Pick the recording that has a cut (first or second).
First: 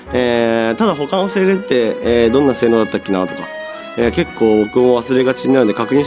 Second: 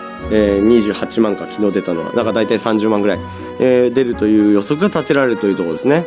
second